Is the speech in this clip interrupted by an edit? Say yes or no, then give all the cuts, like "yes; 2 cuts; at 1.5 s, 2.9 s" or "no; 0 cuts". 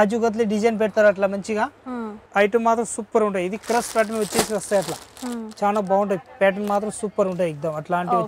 yes; 1 cut; at 2.2 s